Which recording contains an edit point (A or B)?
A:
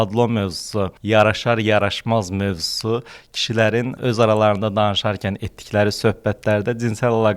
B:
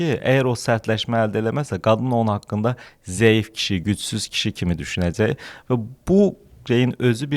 A